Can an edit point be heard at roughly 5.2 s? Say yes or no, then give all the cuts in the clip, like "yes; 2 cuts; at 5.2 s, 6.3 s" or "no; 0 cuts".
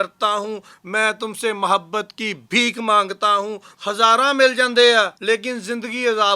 yes; 2 cuts; at 3.7 s, 5.2 s